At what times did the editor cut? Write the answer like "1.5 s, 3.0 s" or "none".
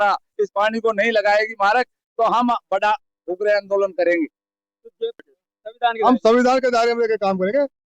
5.2 s